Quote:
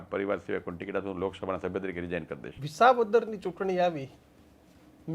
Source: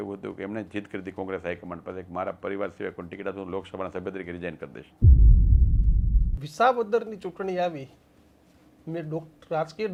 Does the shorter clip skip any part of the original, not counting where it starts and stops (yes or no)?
yes